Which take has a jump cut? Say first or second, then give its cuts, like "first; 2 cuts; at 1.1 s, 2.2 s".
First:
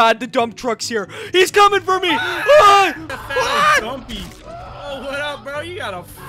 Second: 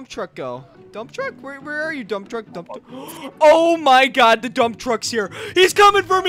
first; 1 cut; at 3.0 s